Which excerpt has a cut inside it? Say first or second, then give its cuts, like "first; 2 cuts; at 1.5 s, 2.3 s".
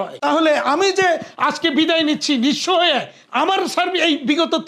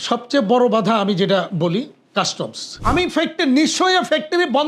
second; 1 cut; at 2.8 s